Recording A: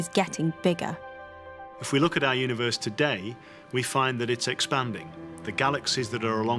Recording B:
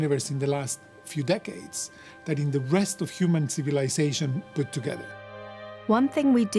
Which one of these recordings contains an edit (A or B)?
A